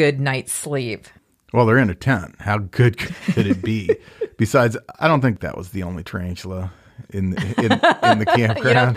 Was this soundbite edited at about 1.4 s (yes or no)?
no